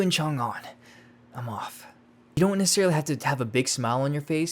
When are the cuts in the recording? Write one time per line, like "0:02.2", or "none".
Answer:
0:02.4